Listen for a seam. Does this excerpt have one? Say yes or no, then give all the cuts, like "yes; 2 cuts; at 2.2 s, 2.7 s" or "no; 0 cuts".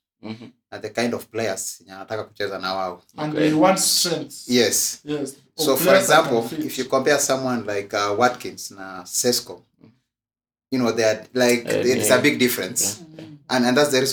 no; 0 cuts